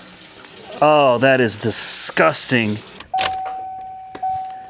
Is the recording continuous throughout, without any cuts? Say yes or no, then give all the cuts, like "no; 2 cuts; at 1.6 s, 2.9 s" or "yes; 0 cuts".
no; 1 cut; at 2.9 s